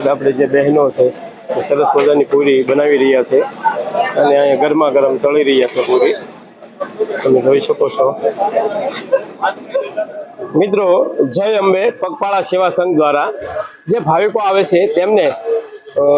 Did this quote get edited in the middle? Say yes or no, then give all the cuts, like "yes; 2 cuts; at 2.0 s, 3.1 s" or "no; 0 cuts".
no; 0 cuts